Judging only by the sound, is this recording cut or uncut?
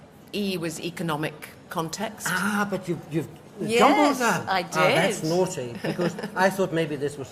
cut